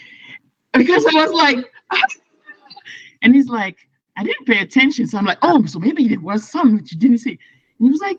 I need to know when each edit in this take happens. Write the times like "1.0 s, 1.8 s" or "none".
none